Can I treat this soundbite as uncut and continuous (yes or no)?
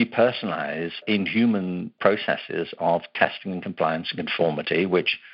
no